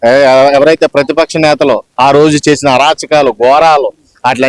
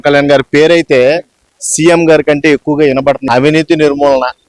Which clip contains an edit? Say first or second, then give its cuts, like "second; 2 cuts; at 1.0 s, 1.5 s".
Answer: second; 1 cut; at 3.2 s